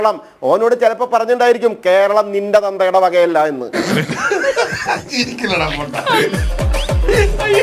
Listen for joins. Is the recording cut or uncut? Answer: uncut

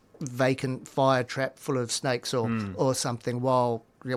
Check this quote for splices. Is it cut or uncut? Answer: uncut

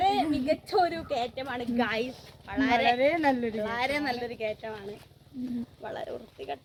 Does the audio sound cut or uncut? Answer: uncut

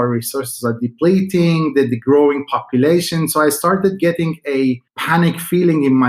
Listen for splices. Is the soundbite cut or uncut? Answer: cut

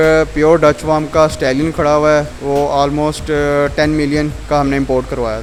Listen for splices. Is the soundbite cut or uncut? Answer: uncut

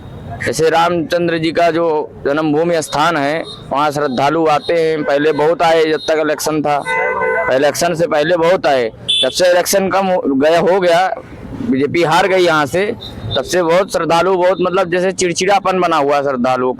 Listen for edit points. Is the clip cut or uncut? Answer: uncut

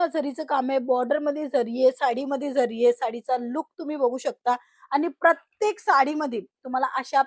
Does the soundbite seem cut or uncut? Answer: uncut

